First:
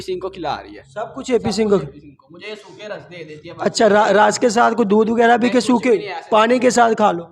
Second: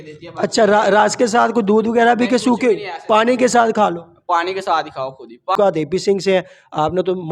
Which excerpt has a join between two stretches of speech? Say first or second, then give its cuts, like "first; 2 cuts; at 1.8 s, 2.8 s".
second; 1 cut; at 5.5 s